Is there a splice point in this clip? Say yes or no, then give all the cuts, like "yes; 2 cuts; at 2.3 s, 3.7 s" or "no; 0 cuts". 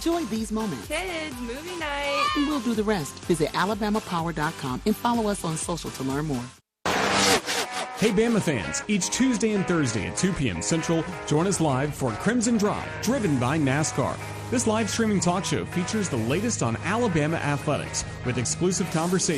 yes; 1 cut; at 6.6 s